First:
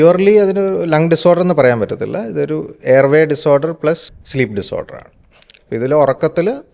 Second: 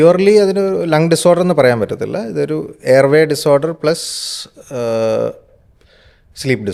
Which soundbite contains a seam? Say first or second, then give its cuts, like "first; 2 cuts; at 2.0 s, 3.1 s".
first; 1 cut; at 4.2 s